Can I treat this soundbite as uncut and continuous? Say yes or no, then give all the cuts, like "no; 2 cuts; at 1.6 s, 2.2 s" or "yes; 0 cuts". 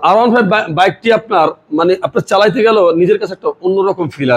yes; 0 cuts